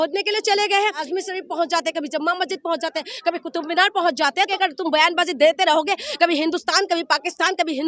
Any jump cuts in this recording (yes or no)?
yes